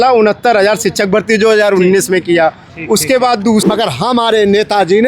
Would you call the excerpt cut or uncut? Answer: cut